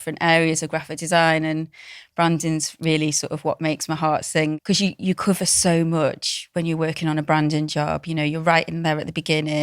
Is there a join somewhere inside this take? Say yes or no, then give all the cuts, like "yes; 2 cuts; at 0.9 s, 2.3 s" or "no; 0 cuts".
yes; 1 cut; at 4.6 s